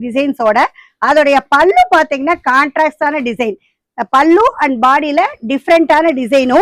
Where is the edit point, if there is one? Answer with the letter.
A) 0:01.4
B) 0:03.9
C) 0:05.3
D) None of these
D